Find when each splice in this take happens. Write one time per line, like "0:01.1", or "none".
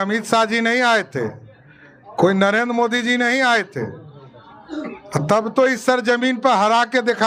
none